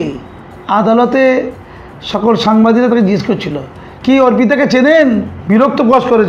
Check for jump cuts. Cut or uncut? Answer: cut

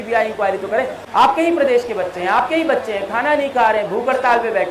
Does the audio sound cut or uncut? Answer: cut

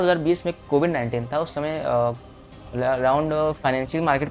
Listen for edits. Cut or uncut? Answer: uncut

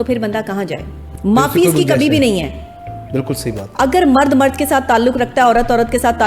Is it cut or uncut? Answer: cut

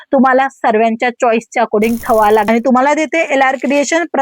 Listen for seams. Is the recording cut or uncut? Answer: cut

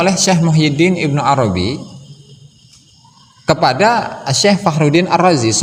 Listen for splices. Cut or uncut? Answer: uncut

